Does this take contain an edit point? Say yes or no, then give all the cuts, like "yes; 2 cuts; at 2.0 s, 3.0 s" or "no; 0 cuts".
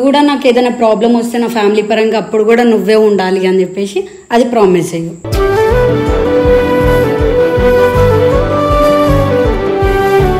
no; 0 cuts